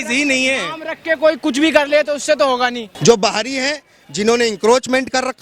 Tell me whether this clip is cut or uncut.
cut